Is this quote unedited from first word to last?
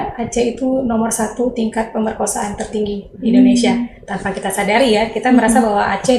yes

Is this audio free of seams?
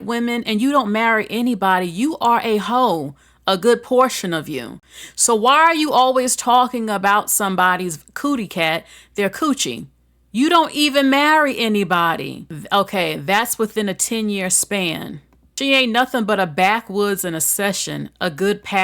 yes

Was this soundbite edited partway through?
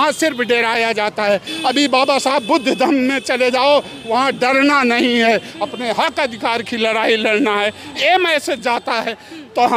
no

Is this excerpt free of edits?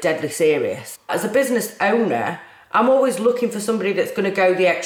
no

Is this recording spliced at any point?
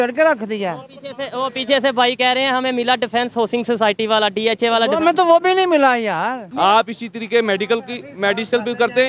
yes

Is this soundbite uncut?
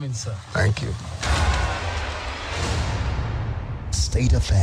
no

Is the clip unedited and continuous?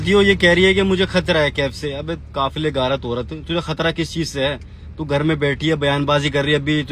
yes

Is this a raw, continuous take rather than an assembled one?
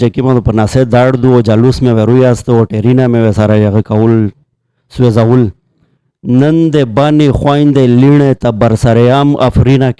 yes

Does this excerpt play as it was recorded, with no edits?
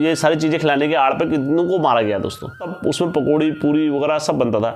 no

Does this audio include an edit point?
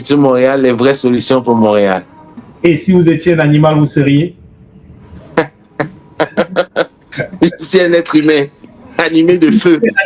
no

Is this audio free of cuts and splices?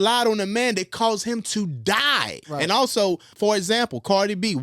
no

